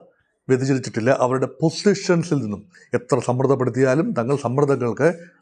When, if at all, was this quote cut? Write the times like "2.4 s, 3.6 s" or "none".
2.7 s